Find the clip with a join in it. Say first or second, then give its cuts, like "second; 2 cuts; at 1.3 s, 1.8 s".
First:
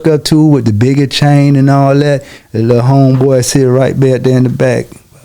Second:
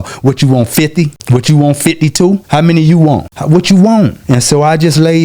second; 4 cuts; at 1.2 s, 2.4 s, 3.3 s, 4.2 s